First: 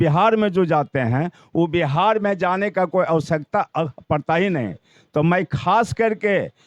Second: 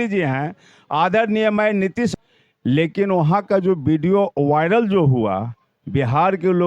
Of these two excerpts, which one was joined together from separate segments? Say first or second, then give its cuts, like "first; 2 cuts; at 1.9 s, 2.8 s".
second; 1 cut; at 2.2 s